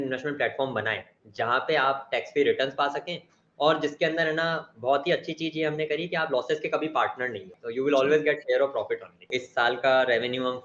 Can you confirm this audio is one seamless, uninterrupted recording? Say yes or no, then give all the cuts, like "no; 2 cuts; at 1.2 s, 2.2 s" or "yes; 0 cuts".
no; 2 cuts; at 7.6 s, 9.4 s